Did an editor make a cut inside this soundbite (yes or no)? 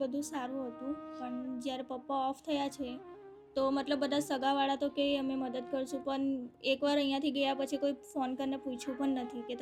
no